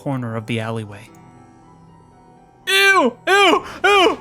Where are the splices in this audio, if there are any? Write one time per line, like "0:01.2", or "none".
none